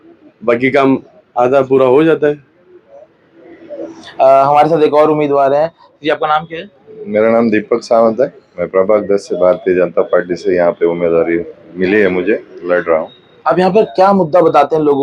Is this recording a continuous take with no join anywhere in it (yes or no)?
yes